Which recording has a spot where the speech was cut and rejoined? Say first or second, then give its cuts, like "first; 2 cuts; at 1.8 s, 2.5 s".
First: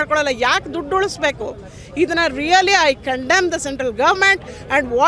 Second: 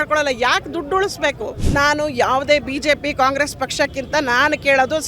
second; 1 cut; at 1.6 s